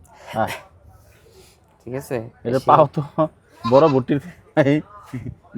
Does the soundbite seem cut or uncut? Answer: uncut